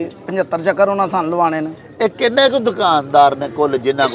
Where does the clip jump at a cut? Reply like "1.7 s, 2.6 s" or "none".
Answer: none